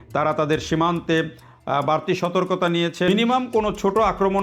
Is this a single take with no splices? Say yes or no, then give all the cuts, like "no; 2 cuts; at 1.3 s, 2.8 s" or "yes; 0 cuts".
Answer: no; 1 cut; at 3.1 s